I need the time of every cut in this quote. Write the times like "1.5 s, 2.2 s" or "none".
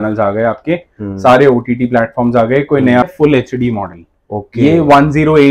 3.0 s